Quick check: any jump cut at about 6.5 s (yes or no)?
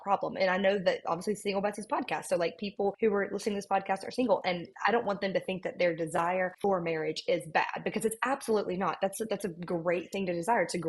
yes